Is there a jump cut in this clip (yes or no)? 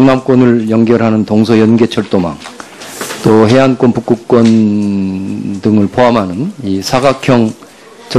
yes